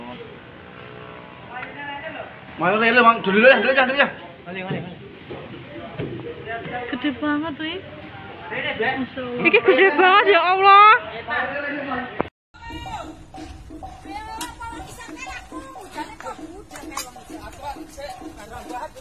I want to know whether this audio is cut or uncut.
cut